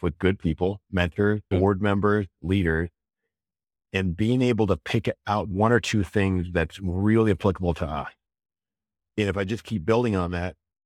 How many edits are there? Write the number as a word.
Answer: two